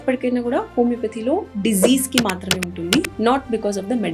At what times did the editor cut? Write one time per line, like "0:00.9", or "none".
0:03.1

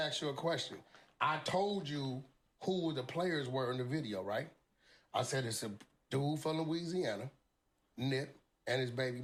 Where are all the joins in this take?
none

